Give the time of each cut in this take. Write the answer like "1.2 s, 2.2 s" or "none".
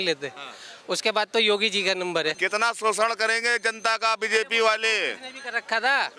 2.4 s